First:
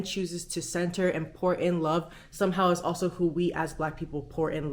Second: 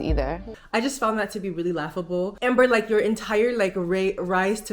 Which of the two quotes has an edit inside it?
second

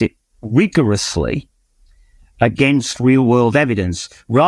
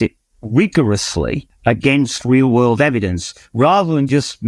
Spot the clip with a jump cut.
second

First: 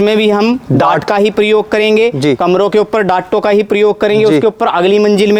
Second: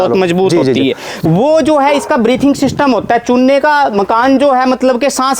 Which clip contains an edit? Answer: second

